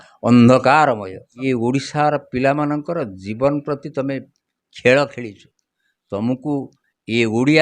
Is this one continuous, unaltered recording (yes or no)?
no